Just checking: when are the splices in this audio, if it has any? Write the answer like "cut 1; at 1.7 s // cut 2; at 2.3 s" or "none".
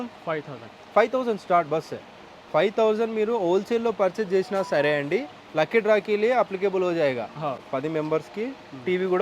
cut 1; at 7.6 s